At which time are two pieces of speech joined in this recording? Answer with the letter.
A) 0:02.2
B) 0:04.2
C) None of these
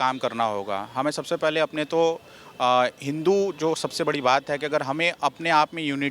C